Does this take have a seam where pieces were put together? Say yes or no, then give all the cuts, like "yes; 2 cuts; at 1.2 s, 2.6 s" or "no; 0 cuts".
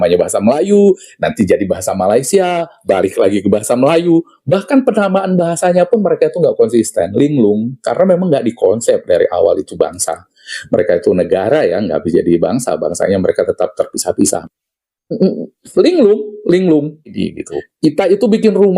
yes; 1 cut; at 17.2 s